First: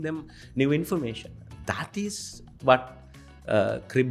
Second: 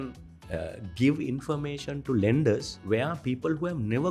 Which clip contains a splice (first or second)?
second